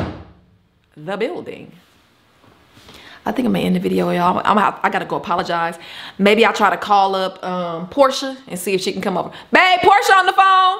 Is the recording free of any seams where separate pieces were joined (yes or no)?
yes